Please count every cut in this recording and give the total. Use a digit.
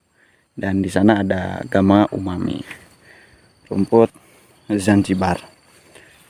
1